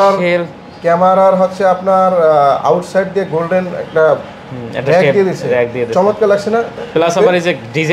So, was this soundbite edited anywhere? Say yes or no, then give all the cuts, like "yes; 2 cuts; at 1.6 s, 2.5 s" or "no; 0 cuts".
no; 0 cuts